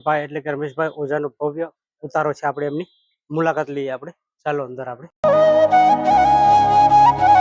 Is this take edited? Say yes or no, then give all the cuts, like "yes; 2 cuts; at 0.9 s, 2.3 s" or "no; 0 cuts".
yes; 1 cut; at 5.2 s